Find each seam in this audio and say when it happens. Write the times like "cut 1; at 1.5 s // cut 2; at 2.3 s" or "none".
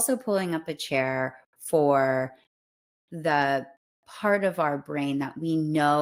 none